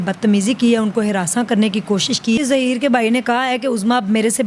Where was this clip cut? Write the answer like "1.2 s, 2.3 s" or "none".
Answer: 2.4 s